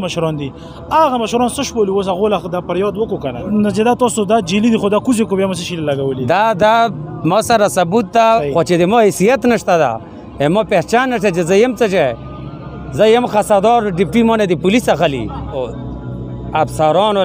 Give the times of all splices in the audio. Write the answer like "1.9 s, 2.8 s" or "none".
3.4 s, 8.3 s, 15.7 s